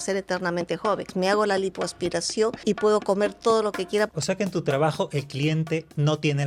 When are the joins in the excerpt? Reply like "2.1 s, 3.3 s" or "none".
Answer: 1.1 s, 2.6 s, 4.1 s